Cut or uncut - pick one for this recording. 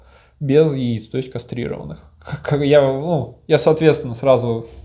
uncut